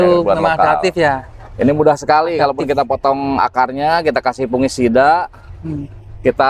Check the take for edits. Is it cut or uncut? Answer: uncut